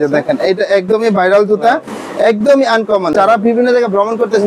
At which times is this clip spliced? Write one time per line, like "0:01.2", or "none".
0:03.1